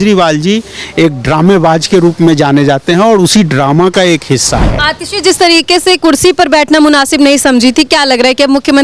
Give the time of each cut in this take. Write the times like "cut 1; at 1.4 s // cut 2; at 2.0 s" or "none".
none